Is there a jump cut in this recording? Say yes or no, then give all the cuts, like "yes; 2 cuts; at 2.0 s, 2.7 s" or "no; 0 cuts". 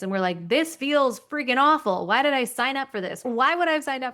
yes; 1 cut; at 3.2 s